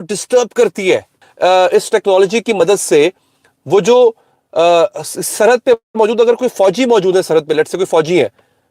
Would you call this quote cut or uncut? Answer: cut